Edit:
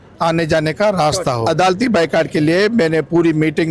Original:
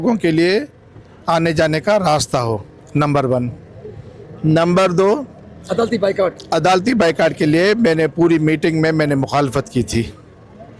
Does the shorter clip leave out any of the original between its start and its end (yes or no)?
yes